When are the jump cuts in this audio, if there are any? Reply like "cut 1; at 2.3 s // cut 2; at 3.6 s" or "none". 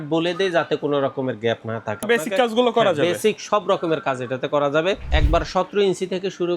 cut 1; at 2.1 s // cut 2; at 5.1 s